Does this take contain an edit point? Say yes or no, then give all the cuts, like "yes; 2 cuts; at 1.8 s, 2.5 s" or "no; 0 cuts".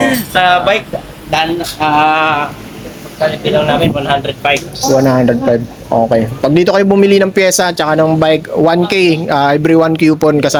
no; 0 cuts